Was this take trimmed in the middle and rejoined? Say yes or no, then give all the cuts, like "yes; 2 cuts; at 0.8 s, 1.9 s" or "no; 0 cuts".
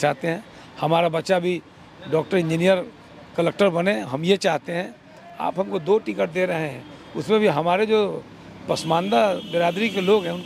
no; 0 cuts